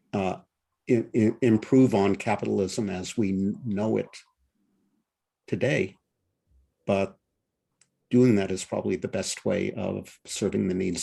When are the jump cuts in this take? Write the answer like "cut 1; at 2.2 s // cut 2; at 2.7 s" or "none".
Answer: none